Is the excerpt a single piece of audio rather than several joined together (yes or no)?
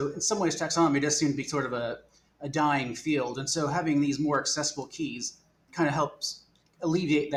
yes